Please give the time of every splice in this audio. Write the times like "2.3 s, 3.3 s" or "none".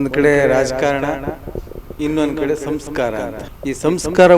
3.4 s